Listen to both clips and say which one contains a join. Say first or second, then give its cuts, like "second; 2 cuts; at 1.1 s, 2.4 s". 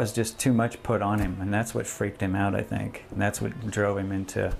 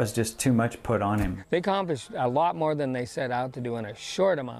second; 1 cut; at 1.4 s